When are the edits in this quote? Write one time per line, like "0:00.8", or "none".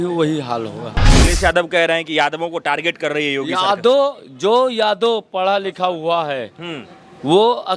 0:01.2